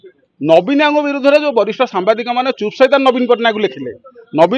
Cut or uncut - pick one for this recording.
uncut